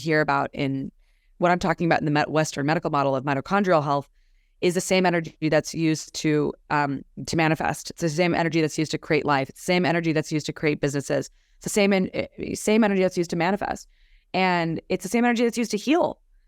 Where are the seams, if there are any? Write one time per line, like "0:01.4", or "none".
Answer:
none